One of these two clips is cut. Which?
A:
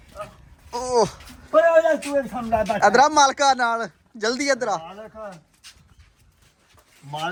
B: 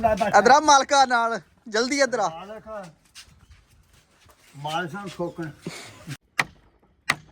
B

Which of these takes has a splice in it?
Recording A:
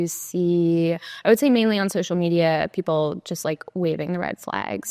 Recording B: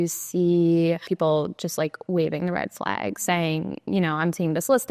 B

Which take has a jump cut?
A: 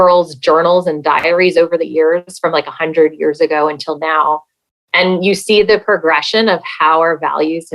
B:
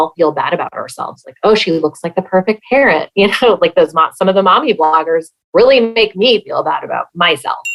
A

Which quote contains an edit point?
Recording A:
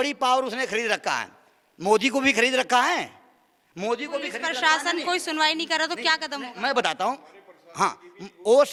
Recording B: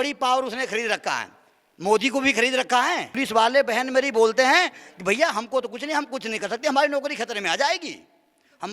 B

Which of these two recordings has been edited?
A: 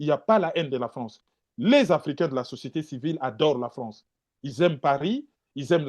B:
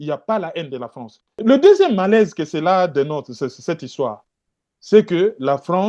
B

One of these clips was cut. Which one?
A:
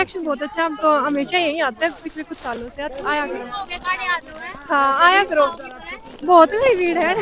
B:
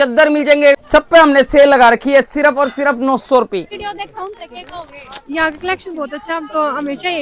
B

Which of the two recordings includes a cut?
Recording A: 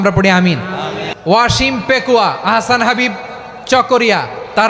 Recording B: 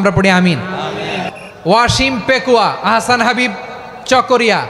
A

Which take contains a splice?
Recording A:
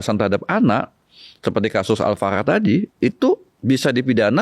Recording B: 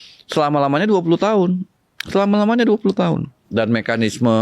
B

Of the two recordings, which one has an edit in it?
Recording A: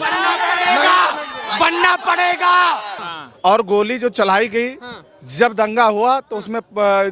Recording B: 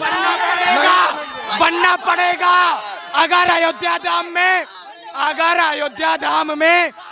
A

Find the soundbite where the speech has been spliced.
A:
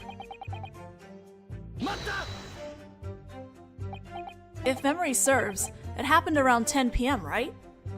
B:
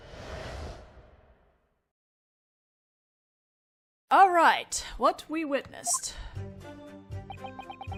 A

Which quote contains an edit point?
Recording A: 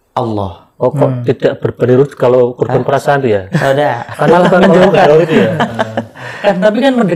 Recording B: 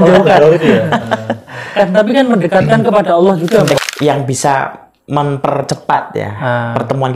B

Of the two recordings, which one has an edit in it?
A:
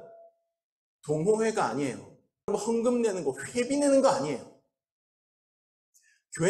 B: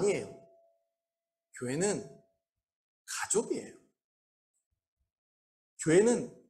A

